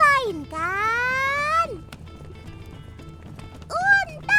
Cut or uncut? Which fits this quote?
uncut